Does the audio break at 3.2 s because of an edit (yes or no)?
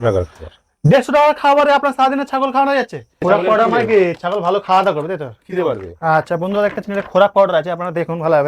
yes